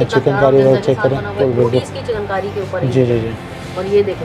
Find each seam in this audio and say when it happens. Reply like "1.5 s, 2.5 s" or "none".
1.4 s